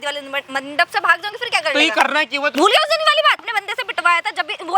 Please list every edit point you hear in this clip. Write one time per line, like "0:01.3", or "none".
0:02.5
0:03.5